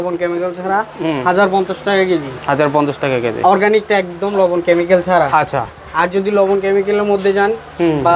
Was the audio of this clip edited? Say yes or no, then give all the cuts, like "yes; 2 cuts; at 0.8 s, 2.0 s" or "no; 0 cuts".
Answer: no; 0 cuts